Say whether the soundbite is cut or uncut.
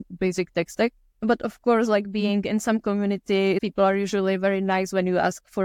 cut